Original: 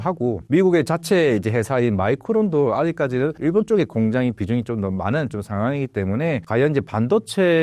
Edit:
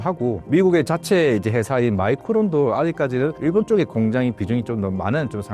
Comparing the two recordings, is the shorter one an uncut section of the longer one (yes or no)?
yes